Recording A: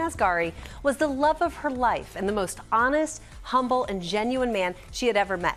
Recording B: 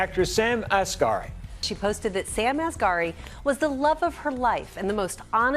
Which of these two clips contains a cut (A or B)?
B